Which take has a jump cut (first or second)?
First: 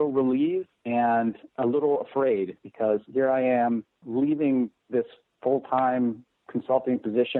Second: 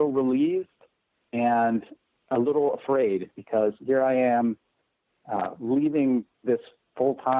first